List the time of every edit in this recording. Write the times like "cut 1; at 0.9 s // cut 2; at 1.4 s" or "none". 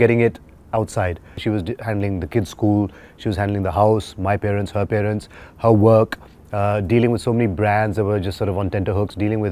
cut 1; at 1.4 s